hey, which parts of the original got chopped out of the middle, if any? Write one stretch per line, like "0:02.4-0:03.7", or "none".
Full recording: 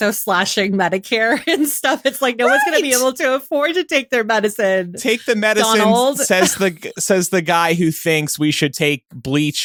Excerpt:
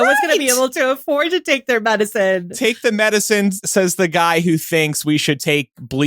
0:05.9-0:06.8